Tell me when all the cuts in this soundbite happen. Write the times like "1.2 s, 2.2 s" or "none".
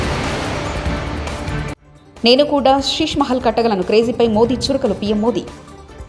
none

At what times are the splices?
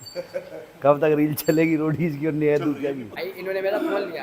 3.1 s

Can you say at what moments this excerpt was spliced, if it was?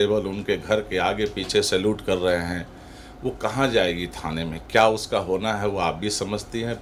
none

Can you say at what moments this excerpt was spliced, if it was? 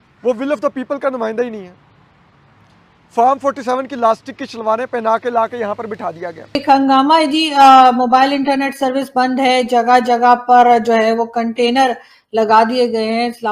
6.5 s

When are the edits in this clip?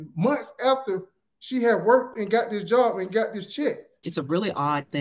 4.0 s

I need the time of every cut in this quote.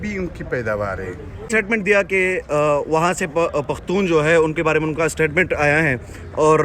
1.5 s

